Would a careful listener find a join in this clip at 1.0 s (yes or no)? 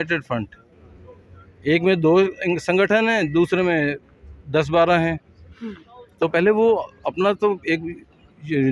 no